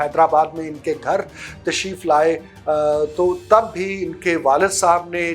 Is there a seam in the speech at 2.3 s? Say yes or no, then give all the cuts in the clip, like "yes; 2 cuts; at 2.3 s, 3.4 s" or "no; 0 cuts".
no; 0 cuts